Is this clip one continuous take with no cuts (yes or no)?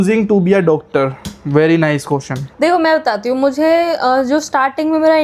yes